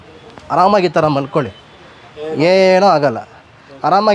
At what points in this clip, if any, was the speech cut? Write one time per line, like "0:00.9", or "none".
none